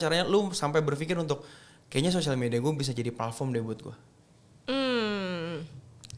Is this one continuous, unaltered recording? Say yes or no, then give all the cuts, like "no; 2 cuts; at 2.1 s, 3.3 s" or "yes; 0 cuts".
yes; 0 cuts